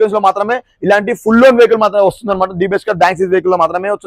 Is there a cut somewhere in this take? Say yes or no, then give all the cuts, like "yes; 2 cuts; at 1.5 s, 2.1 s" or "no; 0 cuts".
no; 0 cuts